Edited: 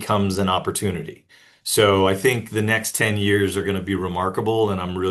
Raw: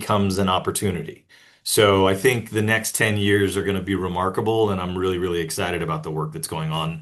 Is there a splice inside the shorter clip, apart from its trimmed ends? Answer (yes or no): no